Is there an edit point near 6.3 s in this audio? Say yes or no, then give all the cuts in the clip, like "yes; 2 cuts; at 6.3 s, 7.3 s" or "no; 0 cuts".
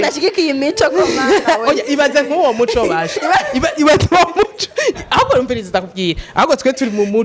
no; 0 cuts